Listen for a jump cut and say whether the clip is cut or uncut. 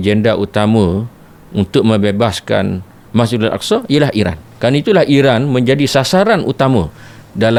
uncut